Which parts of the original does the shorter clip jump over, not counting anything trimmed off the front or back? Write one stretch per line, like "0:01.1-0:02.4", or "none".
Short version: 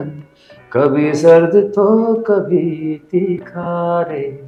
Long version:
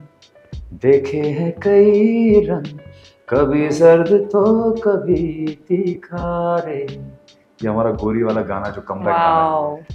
none